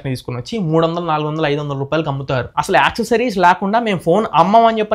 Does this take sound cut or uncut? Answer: cut